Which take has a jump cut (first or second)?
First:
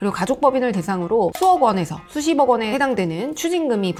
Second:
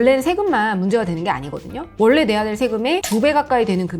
second